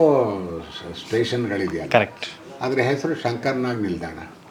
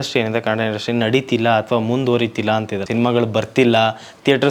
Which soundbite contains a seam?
second; 1 cut; at 2.8 s

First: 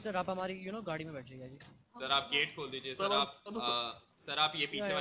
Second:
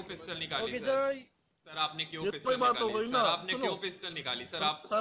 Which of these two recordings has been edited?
second; 1 cut; at 1.6 s

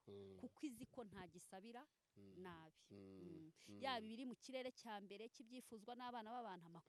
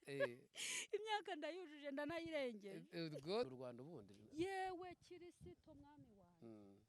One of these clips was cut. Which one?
second; 1 cut; at 3.5 s

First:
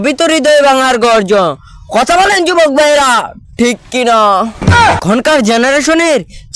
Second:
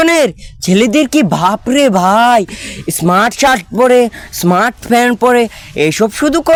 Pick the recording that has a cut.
first; 1 cut; at 4.6 s

